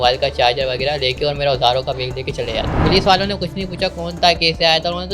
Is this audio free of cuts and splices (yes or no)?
no